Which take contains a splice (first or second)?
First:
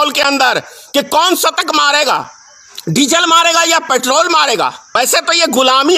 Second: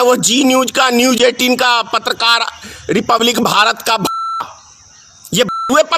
first